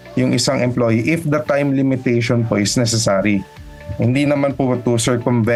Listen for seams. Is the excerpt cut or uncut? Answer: uncut